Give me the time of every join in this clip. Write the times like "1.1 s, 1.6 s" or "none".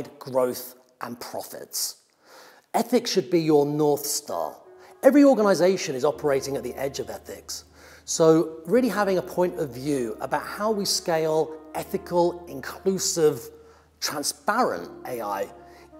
none